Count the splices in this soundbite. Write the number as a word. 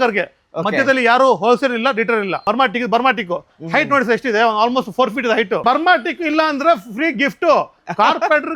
two